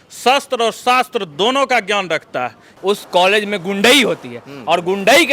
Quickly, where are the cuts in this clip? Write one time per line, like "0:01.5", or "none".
0:02.6